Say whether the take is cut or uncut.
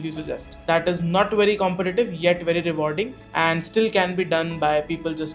uncut